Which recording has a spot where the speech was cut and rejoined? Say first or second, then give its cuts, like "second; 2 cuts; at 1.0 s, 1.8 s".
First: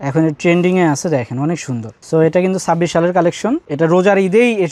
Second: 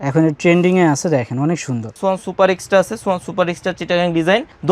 second; 1 cut; at 2.0 s